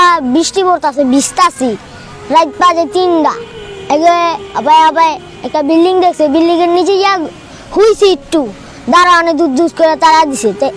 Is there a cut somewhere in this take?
no; 0 cuts

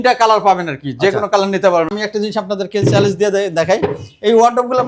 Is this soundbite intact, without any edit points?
no; 1 cut; at 1.9 s

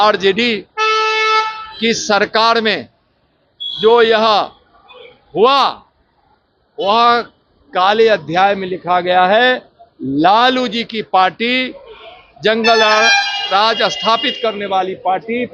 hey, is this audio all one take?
yes; 0 cuts

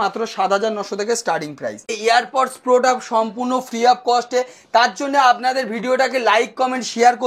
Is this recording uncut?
no; 1 cut; at 1.9 s

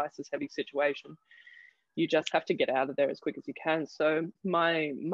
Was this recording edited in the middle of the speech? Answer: no; 0 cuts

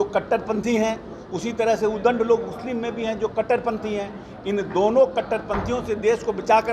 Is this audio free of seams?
yes; 0 cuts

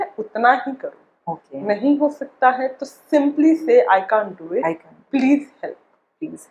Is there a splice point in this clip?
no; 0 cuts

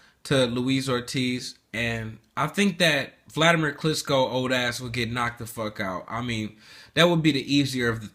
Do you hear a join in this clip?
no; 0 cuts

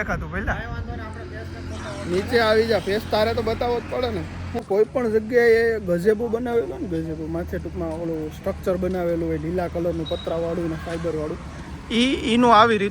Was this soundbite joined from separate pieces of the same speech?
yes; 1 cut; at 4.6 s

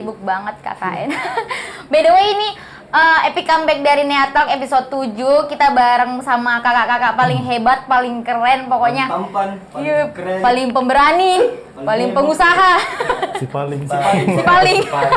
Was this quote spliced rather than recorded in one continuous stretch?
no; 0 cuts

